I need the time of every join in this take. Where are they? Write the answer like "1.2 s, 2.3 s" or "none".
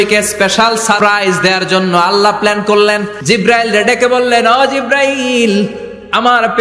1.0 s, 3.2 s

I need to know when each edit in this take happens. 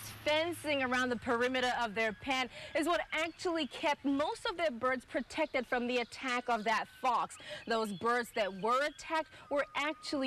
none

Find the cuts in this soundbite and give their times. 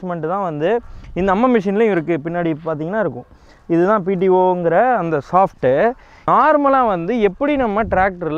6.2 s

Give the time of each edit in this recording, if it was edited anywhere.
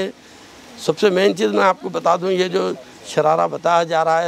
none

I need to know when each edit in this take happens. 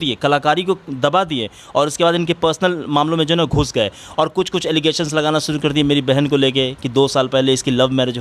none

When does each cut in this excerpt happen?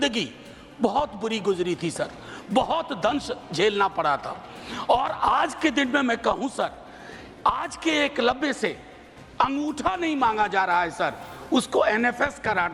none

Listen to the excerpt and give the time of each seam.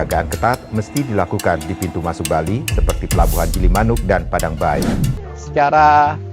5.3 s

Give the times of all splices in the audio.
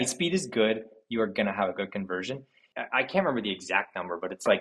2.6 s

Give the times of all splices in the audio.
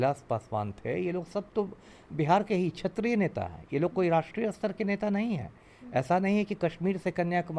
none

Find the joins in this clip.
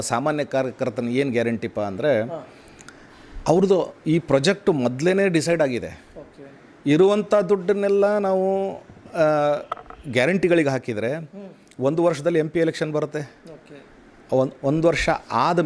none

